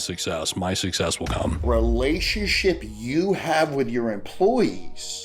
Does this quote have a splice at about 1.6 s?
yes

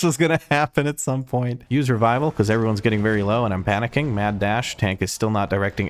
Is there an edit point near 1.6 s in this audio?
yes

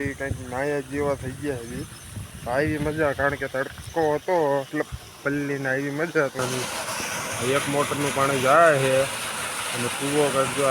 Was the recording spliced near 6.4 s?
yes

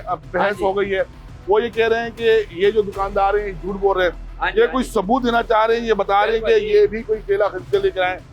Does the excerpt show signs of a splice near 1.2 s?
no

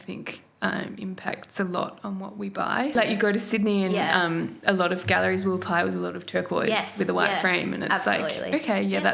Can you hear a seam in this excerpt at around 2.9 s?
yes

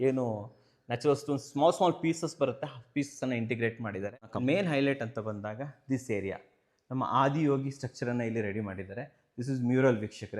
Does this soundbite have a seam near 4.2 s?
yes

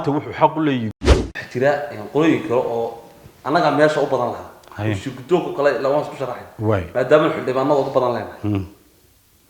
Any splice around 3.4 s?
no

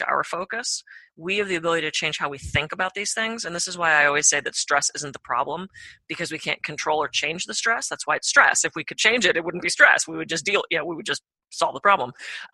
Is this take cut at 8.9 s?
yes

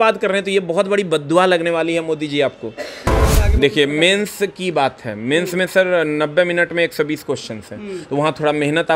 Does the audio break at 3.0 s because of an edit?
yes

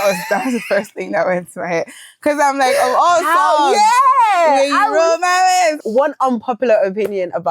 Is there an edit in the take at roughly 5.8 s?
yes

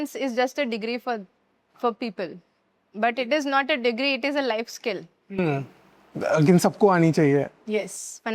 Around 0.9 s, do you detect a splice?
no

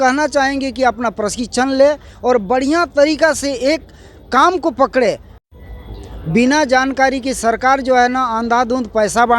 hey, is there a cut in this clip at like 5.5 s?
yes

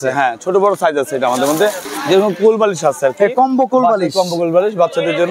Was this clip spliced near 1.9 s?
yes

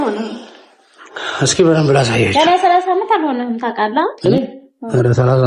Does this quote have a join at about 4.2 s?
yes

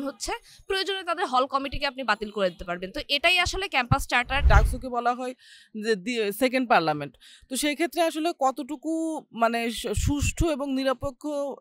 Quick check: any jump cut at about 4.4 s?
yes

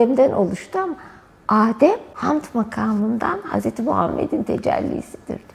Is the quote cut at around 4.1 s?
no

